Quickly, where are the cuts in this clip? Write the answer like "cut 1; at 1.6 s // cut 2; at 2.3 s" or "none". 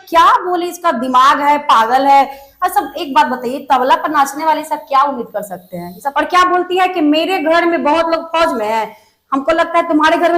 cut 1; at 6.0 s